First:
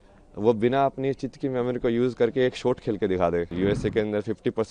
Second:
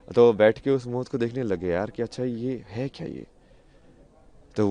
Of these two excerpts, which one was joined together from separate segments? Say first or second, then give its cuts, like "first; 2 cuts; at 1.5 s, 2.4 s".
first; 1 cut; at 3.5 s